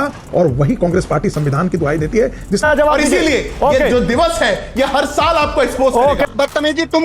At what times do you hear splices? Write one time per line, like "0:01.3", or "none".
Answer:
0:02.6
0:06.3